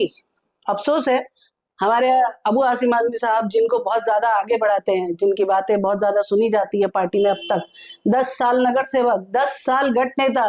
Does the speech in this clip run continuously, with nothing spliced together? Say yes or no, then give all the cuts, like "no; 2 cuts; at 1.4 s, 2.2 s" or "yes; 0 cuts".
yes; 0 cuts